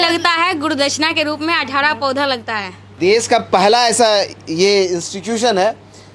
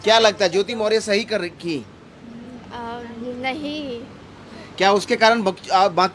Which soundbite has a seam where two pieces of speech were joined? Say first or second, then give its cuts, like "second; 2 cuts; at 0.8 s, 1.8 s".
first; 1 cut; at 2.8 s